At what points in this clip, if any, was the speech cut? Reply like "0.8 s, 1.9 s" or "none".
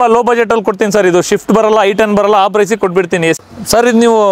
3.4 s